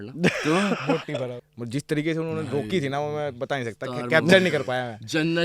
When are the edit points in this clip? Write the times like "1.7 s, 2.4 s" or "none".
1.4 s